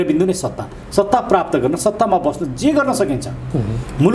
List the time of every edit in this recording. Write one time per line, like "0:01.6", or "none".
none